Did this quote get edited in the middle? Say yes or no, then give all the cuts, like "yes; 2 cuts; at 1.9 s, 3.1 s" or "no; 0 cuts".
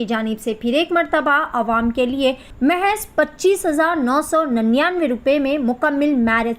yes; 1 cut; at 2.5 s